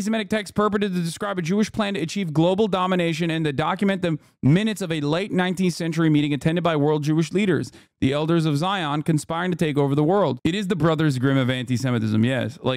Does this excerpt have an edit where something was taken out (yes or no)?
yes